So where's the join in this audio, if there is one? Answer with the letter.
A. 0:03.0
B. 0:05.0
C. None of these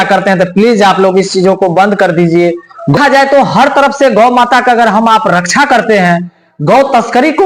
A